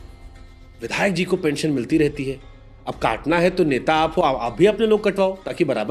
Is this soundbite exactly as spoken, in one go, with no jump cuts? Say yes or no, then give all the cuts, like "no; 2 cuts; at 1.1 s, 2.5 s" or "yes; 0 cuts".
yes; 0 cuts